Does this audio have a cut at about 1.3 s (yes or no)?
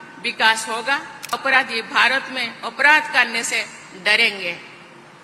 yes